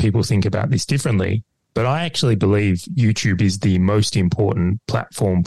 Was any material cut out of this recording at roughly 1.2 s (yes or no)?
no